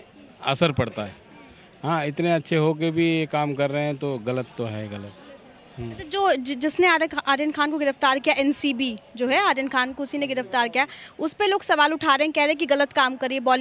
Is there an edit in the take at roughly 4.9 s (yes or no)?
no